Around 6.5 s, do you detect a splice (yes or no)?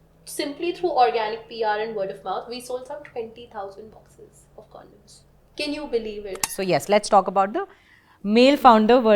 yes